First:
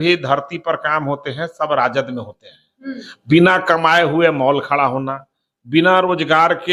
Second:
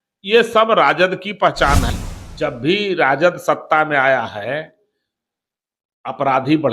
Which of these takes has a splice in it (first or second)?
second